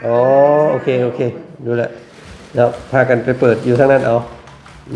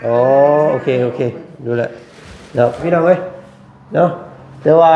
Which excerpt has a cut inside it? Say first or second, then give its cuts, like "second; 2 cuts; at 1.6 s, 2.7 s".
second; 1 cut; at 2.8 s